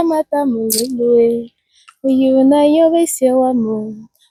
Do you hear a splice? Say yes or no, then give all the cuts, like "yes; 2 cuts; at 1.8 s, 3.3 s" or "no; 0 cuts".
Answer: no; 0 cuts